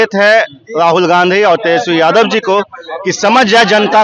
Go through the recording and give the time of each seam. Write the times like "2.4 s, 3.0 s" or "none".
none